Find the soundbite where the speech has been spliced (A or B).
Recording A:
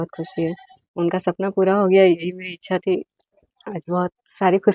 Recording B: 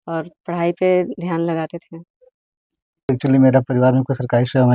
B